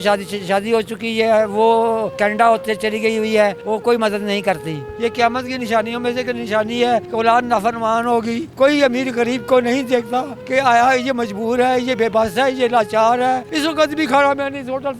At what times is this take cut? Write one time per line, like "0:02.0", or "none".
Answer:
0:03.6
0:04.9
0:08.5
0:13.5